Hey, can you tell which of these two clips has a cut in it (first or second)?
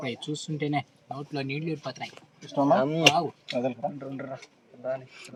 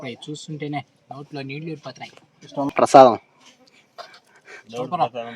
second